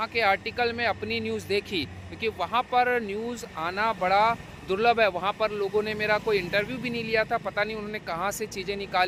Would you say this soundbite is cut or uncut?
uncut